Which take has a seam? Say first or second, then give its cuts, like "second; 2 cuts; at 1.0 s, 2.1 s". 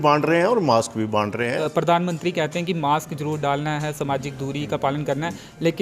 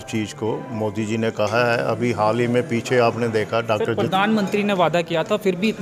first; 1 cut; at 1.3 s